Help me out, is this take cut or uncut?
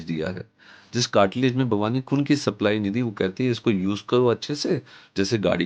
uncut